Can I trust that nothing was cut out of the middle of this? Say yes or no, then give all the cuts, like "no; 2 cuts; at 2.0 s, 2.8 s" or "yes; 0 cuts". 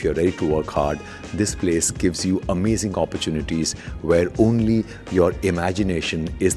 yes; 0 cuts